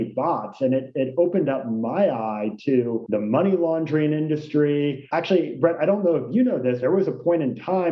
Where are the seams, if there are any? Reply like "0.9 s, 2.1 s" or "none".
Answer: 6.8 s